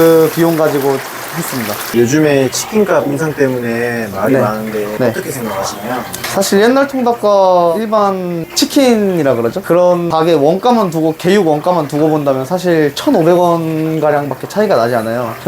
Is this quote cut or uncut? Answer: cut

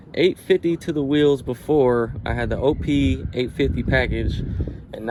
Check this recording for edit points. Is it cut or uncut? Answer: uncut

